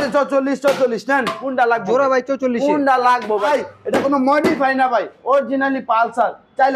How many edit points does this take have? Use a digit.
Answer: 1